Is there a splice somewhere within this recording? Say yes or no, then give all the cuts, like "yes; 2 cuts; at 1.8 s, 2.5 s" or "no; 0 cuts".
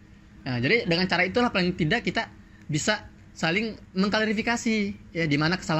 no; 0 cuts